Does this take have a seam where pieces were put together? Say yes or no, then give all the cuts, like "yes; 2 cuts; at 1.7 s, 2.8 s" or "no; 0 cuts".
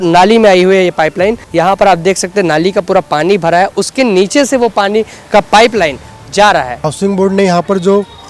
yes; 2 cuts; at 1.4 s, 6.8 s